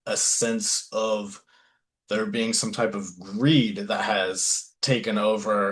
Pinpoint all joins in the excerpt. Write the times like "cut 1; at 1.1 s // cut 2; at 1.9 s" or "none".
none